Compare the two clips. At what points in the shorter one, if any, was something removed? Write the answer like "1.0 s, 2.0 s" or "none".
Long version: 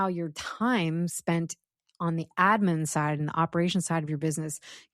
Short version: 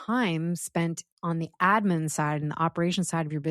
1.1 s